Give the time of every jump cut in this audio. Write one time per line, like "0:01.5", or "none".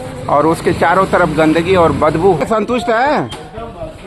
0:02.4